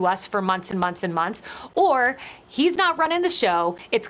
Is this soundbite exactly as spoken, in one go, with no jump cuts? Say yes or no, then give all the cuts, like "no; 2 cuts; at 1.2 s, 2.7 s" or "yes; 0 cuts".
yes; 0 cuts